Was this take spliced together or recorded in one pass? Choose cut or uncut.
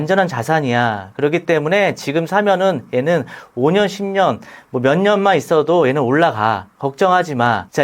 uncut